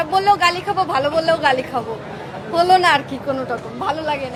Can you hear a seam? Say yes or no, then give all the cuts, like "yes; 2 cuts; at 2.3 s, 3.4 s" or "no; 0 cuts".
no; 0 cuts